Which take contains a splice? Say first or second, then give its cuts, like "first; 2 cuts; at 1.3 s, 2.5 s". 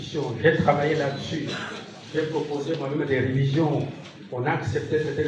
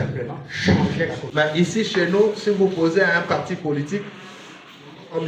second; 1 cut; at 1.2 s